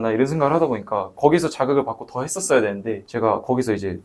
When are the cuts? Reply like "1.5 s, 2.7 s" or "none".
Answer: none

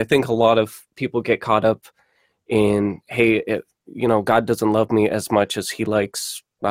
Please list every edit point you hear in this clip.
none

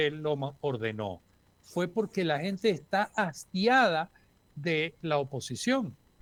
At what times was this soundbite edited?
none

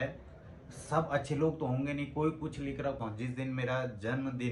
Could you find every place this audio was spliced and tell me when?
3.0 s

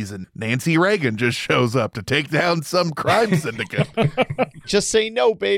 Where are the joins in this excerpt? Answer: 4.7 s

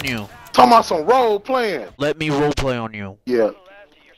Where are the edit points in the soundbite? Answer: 1.9 s

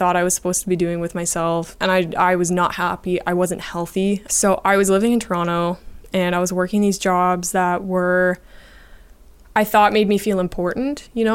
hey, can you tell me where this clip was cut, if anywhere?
1.7 s, 4.3 s

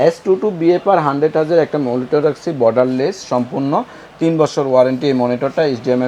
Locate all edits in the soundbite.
none

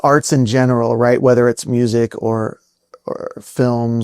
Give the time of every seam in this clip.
none

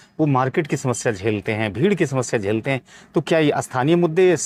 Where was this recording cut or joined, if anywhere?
none

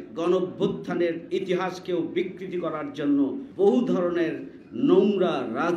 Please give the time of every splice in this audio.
3.4 s

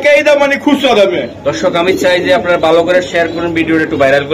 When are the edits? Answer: none

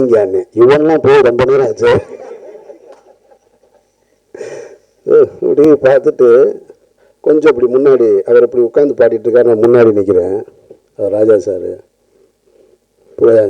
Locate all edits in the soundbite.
none

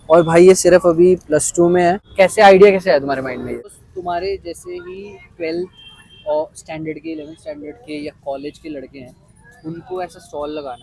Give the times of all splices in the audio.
2.0 s, 3.8 s

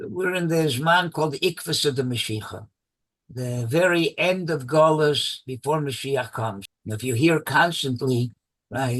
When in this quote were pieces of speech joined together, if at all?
6.6 s

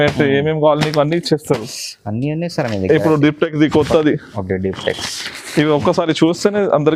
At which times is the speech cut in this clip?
none

